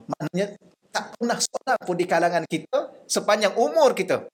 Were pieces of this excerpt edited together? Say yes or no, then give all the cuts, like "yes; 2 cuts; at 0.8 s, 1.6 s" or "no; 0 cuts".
no; 0 cuts